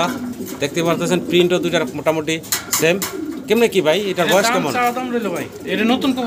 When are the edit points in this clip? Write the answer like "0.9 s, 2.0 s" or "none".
none

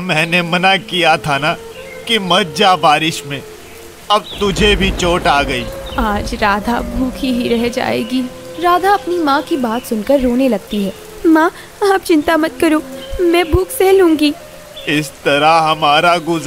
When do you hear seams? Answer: none

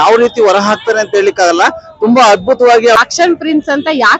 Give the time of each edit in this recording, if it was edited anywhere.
3.0 s

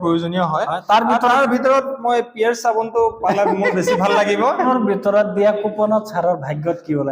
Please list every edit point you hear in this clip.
4.6 s

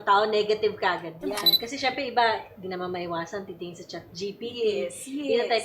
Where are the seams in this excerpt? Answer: 1.5 s

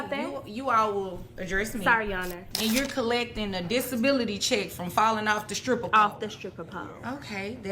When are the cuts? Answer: 2.4 s, 5.6 s

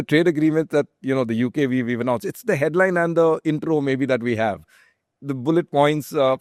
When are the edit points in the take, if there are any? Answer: none

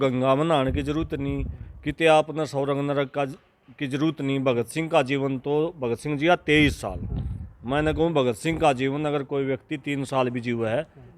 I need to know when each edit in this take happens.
none

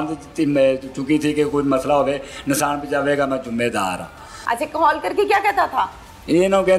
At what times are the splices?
4.3 s

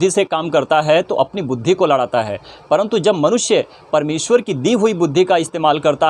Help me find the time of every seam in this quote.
none

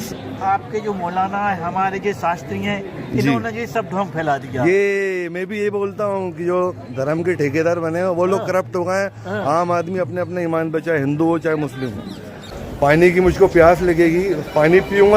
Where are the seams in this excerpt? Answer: 12.5 s

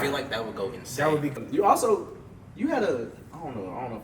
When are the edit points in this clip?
1.4 s

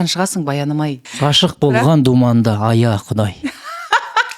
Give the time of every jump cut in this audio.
1.1 s

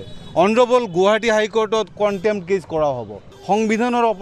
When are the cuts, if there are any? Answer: 3.3 s

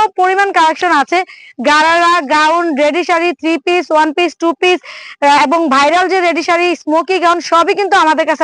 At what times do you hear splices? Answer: none

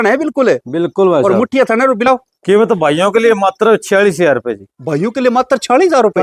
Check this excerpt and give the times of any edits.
2.0 s

